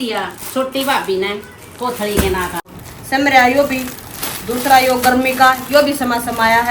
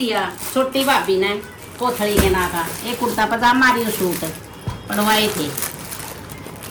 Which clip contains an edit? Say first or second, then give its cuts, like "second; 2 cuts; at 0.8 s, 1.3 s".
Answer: first; 1 cut; at 2.8 s